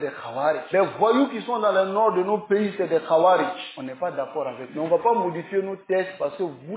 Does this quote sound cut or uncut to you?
uncut